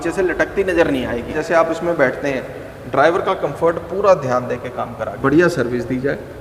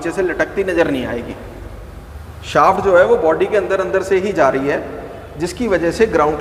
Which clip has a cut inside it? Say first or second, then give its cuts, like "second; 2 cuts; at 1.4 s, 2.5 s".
first; 2 cuts; at 1.3 s, 5.1 s